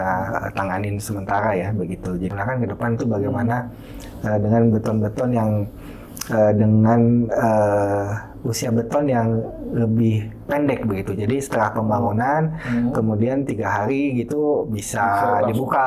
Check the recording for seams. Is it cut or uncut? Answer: cut